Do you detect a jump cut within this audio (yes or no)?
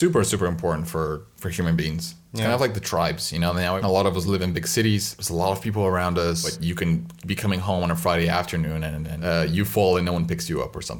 yes